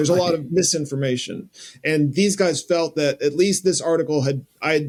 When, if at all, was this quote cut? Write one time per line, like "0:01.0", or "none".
none